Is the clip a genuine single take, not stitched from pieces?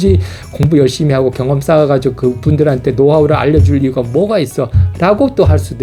yes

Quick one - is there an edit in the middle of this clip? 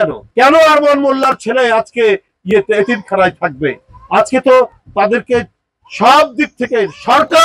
no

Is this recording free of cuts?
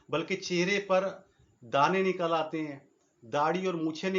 yes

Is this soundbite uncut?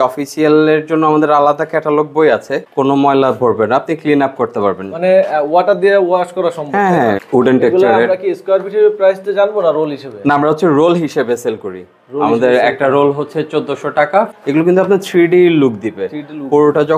no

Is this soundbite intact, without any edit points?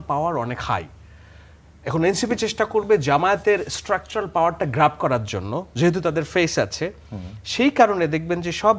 yes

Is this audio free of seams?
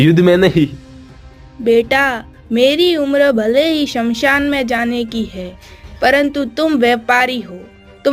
yes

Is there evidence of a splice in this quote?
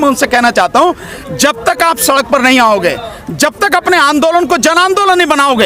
no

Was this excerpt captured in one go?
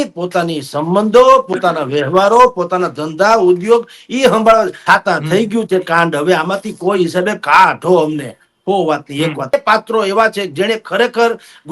no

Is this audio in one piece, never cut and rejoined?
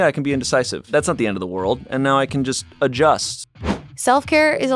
no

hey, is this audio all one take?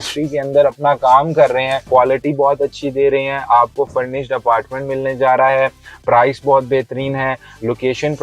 no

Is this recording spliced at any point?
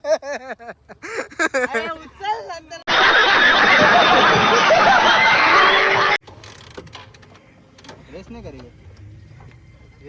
no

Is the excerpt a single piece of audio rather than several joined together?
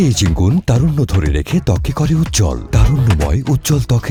yes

